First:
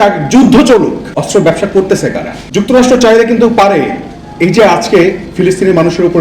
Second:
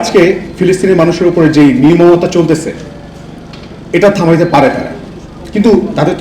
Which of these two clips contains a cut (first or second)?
first